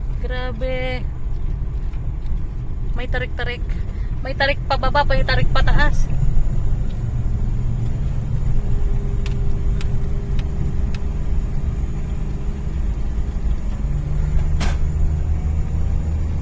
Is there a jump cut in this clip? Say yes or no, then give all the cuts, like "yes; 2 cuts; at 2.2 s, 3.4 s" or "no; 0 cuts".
no; 0 cuts